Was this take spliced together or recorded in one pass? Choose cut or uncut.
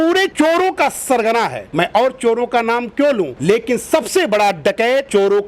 uncut